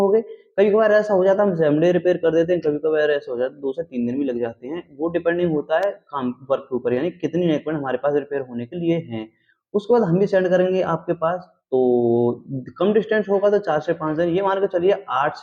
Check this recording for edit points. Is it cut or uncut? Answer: uncut